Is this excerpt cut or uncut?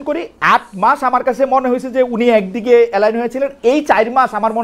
uncut